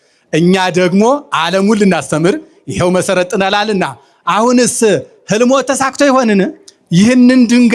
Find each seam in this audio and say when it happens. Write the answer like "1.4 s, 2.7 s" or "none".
6.7 s